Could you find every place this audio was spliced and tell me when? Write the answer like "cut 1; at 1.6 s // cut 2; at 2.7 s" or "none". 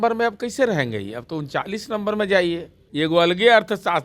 cut 1; at 2.8 s